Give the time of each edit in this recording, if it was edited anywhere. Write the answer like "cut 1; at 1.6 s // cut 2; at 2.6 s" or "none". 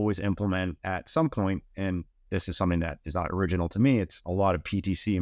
cut 1; at 4.2 s